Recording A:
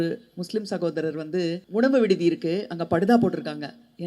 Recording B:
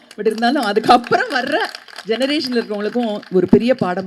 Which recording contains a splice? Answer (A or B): A